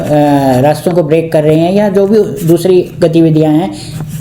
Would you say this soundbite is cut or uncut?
uncut